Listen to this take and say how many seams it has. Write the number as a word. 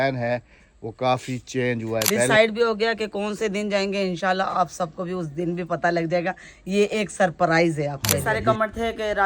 two